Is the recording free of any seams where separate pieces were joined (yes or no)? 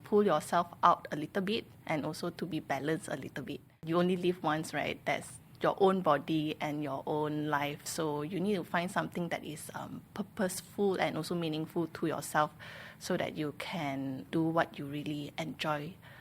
no